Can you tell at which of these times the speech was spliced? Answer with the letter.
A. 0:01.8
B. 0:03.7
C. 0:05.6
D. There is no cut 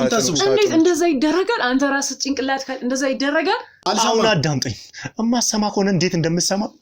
B